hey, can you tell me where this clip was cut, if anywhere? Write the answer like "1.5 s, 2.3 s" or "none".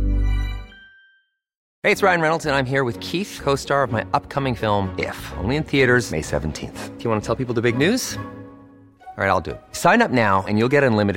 1.6 s